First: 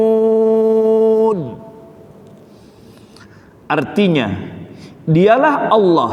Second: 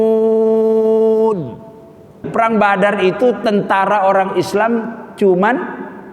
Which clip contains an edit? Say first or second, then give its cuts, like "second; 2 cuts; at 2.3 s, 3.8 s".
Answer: second; 1 cut; at 2.3 s